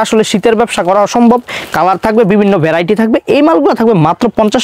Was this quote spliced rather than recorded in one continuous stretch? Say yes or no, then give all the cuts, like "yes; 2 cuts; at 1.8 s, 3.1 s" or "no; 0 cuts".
no; 0 cuts